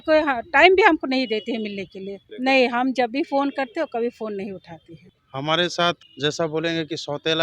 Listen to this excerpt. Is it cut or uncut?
cut